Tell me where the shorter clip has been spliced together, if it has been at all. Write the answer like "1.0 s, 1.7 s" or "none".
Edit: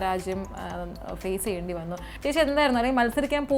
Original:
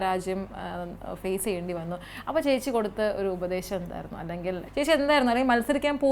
2.1 s